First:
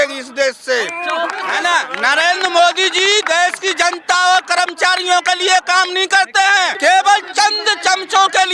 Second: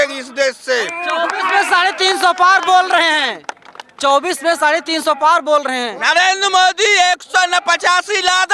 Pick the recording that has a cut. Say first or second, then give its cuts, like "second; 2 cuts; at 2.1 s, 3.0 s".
first; 2 cuts; at 1.4 s, 6.7 s